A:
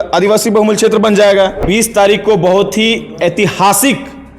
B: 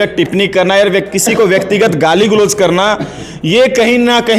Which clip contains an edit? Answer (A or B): A